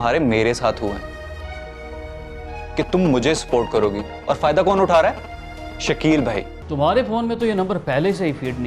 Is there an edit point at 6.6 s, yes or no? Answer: yes